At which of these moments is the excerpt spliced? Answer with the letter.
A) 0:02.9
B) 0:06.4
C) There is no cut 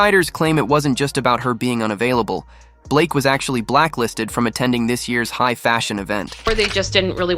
B